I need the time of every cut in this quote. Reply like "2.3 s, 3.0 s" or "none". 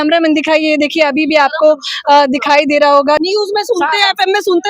3.2 s